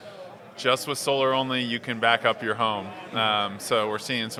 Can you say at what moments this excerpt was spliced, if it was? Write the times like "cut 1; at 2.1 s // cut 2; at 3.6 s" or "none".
none